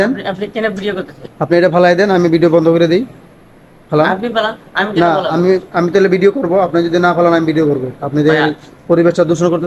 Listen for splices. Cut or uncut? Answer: uncut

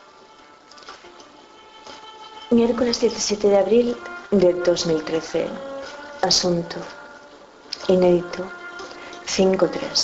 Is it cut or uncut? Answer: cut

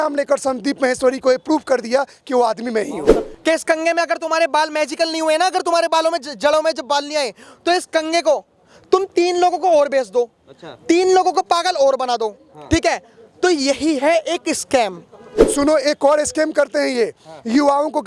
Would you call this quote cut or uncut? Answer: cut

